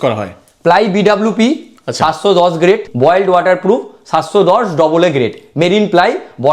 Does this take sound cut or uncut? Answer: cut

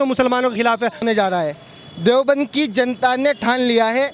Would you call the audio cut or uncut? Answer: cut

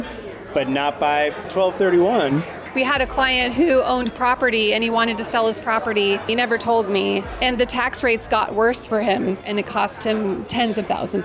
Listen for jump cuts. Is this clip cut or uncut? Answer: cut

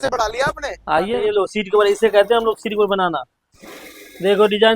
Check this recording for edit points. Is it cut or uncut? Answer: cut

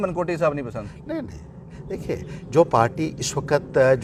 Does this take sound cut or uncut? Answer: uncut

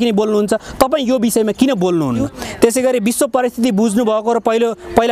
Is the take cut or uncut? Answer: cut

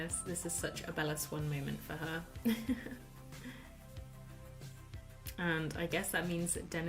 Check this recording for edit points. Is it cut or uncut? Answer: uncut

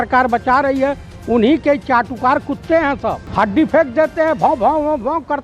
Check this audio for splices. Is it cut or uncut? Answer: cut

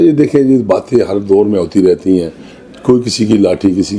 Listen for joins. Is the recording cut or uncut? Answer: uncut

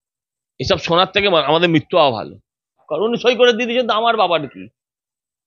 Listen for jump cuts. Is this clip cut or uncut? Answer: cut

